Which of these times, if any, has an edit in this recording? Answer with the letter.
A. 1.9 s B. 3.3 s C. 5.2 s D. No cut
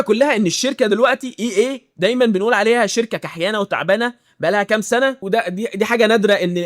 C